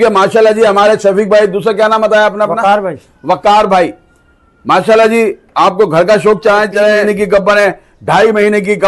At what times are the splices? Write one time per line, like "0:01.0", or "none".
0:07.0